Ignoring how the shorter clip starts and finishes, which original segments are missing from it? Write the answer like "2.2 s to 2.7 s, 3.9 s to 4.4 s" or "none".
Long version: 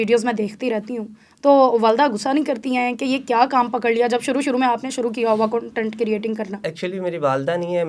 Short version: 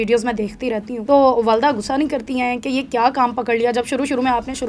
0.9 s to 1.3 s